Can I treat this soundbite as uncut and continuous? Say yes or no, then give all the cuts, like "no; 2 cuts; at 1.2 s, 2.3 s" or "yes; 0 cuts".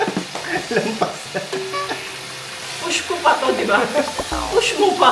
no; 1 cut; at 2.7 s